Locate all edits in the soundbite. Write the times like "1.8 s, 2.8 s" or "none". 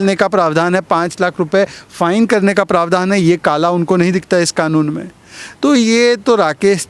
none